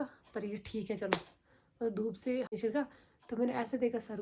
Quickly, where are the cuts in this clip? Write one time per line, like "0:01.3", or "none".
0:02.6